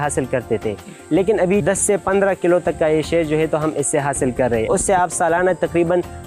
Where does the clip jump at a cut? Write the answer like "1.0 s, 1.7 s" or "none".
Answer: 1.6 s, 4.7 s